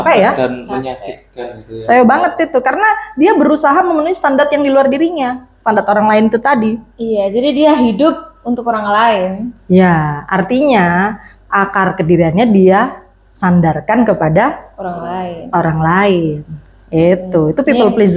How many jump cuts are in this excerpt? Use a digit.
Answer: 0